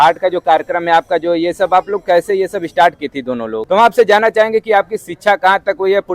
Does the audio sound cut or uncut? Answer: cut